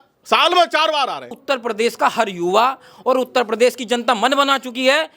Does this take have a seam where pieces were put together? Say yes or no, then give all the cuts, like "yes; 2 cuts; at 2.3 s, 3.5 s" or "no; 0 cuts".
yes; 1 cut; at 1.4 s